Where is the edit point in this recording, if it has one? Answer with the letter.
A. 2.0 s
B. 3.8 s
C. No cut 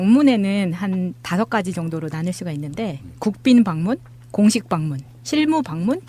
A